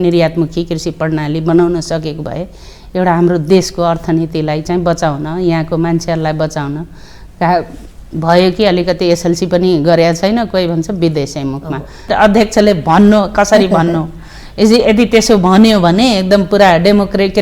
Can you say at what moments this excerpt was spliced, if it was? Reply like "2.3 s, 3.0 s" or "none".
12.1 s